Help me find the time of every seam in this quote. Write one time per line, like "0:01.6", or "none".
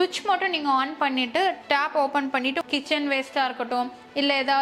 0:02.6

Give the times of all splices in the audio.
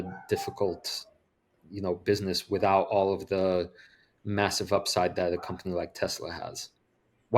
none

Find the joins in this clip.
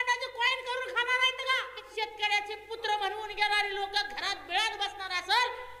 0:01.9

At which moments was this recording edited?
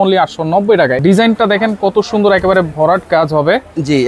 0:01.0

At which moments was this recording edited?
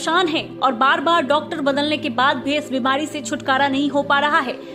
none

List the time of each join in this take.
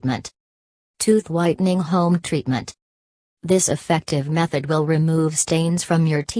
0:03.9

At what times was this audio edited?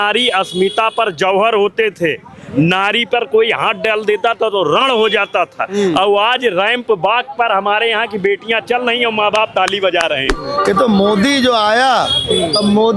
0:10.5

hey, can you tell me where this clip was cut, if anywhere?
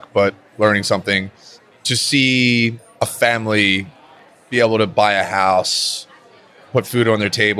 none

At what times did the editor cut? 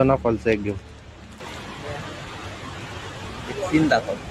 0:01.5

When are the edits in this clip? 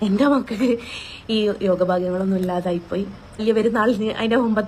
0:03.4

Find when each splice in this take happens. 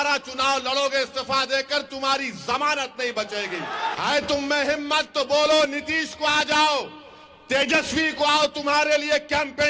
0:03.9

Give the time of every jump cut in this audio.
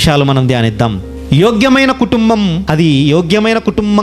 0:02.6

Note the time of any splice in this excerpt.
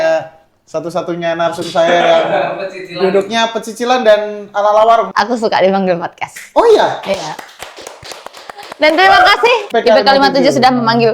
0:05.1
0:09.7

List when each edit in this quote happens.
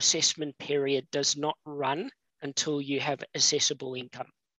none

